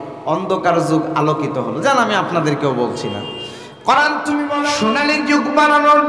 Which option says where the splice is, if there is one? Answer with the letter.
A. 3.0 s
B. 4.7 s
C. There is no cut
B